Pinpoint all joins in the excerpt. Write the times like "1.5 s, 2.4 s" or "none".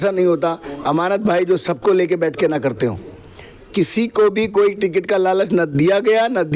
none